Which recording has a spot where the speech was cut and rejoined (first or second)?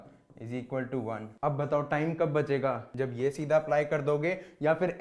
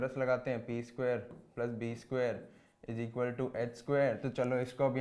first